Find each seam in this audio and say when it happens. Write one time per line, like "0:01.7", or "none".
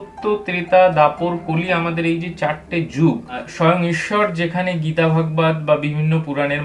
0:03.5